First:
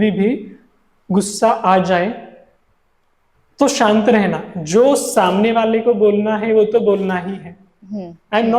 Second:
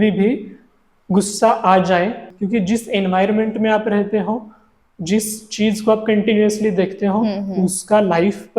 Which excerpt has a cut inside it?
second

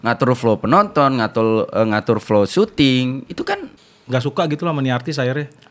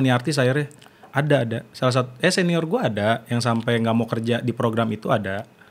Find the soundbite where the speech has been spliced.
first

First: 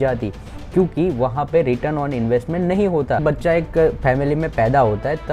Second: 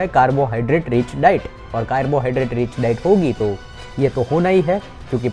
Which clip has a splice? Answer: first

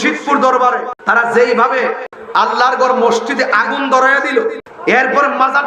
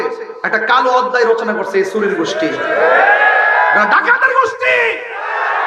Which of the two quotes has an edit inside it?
first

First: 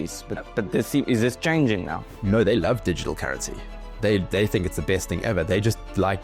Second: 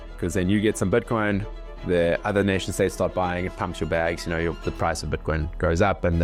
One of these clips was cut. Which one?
first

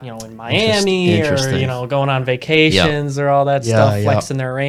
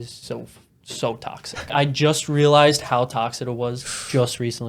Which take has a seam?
second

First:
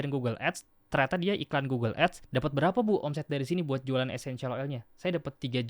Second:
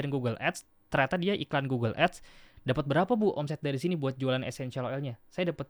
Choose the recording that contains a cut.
first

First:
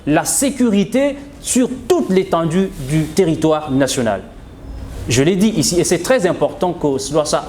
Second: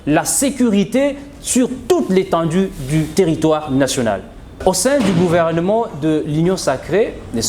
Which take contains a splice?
second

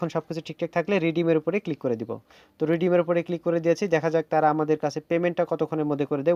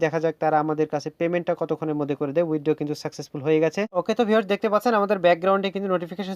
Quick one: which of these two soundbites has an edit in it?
second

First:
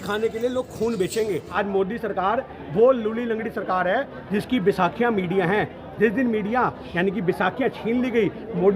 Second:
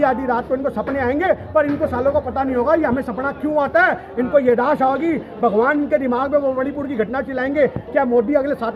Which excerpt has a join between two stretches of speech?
first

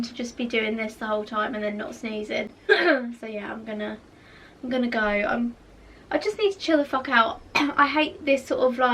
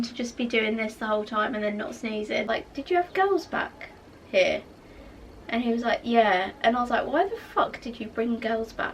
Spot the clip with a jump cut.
second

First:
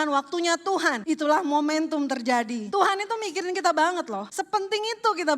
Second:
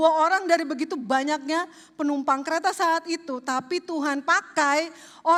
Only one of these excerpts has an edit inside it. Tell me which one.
first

